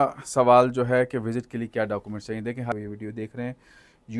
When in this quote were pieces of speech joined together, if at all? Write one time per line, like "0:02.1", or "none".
0:02.7